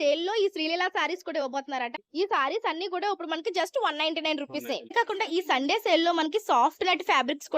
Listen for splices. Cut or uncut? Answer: cut